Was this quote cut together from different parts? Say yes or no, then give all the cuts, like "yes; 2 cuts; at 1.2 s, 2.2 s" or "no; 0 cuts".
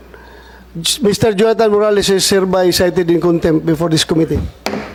no; 0 cuts